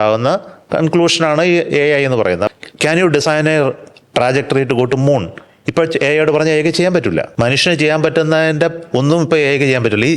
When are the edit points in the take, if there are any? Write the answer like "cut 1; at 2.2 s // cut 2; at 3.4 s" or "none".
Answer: cut 1; at 2.5 s // cut 2; at 7.3 s